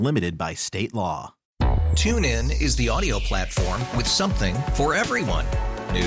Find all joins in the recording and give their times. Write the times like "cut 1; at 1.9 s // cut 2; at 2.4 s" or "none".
cut 1; at 1.4 s